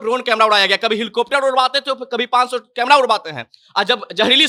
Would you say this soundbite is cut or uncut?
uncut